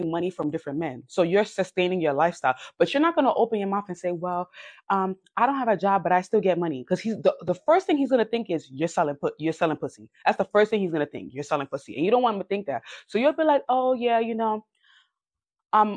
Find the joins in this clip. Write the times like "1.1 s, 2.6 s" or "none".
none